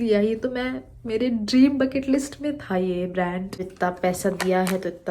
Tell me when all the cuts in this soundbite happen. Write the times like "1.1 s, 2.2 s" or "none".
3.6 s